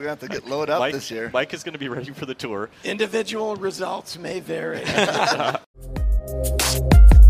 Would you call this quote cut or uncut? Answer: cut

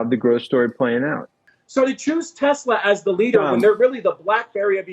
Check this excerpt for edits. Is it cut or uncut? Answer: cut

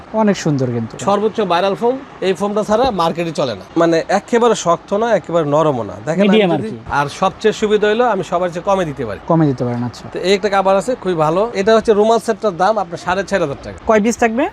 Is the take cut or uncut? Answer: cut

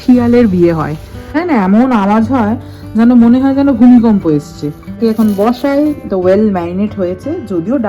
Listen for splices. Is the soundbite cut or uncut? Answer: cut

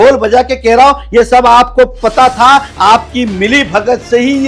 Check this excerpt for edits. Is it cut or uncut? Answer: uncut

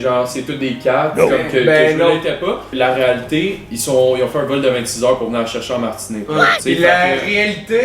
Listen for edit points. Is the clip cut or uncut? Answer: uncut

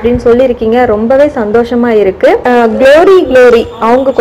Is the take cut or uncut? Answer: cut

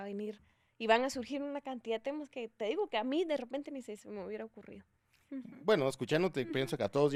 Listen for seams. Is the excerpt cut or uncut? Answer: uncut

